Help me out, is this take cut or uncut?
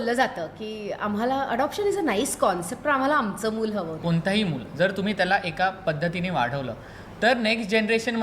cut